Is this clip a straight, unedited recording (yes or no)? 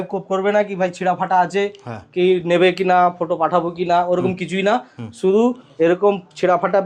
yes